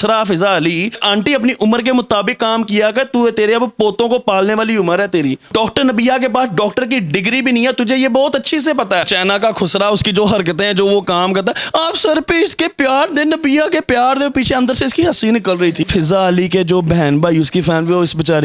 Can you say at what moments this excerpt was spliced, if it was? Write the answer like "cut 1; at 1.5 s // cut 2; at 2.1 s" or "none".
cut 1; at 1.0 s // cut 2; at 5.5 s // cut 3; at 9.1 s // cut 4; at 15.8 s